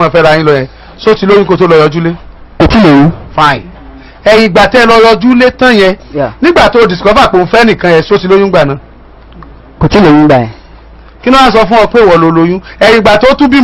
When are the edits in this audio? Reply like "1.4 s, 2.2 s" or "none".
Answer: none